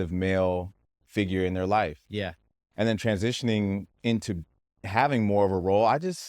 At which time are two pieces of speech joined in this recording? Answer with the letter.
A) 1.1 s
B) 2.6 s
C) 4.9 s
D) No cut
C